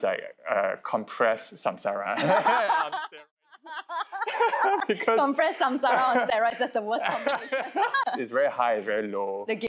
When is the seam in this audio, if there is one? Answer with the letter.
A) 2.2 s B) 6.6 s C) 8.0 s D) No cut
C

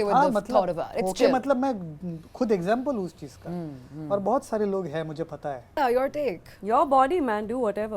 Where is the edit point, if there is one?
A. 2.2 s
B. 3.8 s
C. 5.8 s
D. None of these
C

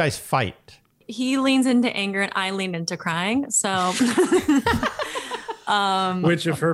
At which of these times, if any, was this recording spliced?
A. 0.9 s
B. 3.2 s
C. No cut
A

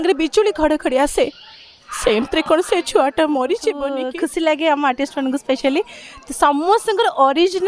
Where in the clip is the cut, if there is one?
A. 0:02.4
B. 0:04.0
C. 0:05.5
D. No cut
B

